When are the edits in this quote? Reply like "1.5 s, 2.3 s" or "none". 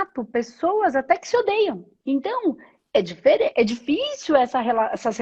1.9 s